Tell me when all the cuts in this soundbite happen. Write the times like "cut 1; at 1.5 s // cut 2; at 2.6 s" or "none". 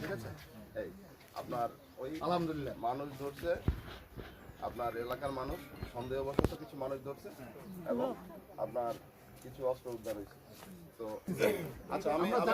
cut 1; at 11.2 s